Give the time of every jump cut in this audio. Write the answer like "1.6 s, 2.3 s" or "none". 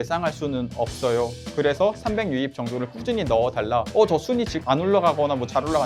3.9 s, 4.6 s